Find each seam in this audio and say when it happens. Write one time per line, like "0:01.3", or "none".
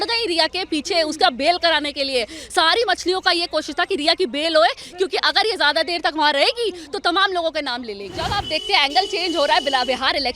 0:08.4